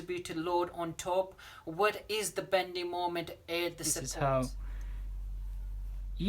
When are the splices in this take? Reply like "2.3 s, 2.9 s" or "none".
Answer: 4.1 s